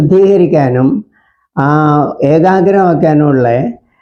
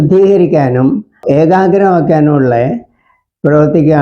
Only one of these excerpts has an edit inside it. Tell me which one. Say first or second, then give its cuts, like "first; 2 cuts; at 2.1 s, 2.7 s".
second; 1 cut; at 1.2 s